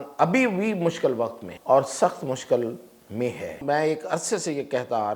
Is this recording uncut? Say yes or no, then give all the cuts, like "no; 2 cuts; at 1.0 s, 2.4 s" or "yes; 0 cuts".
no; 2 cuts; at 1.5 s, 3.6 s